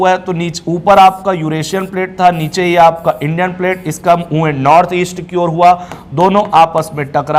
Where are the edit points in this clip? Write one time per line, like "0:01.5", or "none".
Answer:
none